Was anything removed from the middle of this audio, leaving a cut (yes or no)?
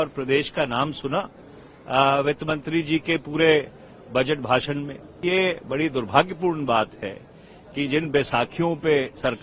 yes